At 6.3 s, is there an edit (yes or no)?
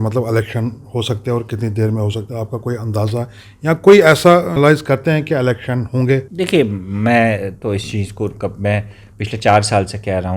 yes